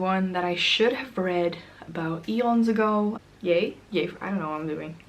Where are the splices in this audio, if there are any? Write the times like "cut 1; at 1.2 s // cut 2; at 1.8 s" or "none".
cut 1; at 3.2 s